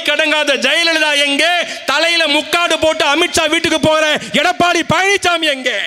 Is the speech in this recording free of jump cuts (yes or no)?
yes